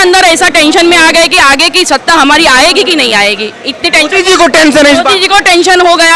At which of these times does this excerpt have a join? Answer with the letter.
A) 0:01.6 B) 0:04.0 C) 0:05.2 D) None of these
D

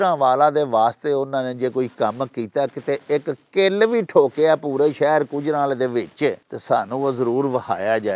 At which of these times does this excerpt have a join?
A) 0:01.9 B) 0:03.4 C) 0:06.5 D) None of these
C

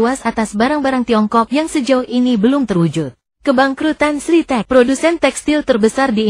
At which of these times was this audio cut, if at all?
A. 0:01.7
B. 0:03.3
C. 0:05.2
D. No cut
B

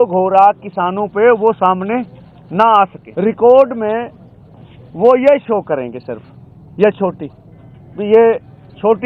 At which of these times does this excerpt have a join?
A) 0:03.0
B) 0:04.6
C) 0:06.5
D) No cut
A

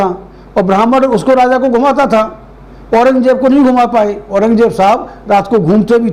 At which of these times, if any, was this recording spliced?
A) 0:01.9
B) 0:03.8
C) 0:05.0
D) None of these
D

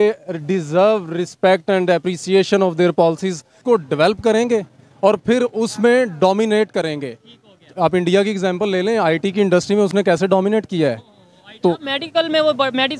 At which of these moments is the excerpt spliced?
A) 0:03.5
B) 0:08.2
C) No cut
A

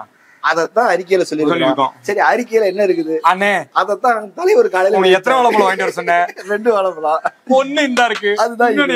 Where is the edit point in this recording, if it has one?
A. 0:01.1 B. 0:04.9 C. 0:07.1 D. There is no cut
D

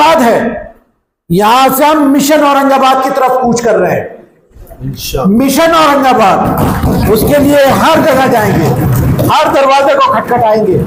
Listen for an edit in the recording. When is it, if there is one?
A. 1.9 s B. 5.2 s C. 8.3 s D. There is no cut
D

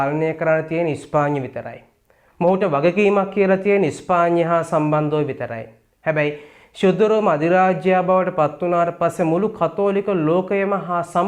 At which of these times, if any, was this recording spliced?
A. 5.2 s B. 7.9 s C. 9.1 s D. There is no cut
D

